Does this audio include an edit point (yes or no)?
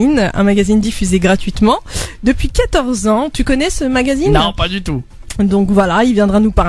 no